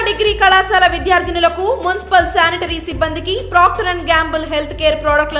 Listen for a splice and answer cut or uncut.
uncut